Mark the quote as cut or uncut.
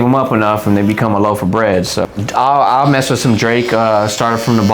cut